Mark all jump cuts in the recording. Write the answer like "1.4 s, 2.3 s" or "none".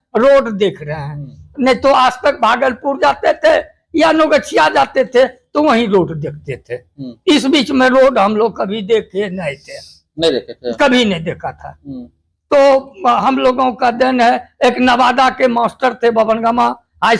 none